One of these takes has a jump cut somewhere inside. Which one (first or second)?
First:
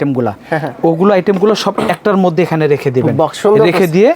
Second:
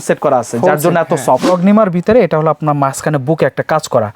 second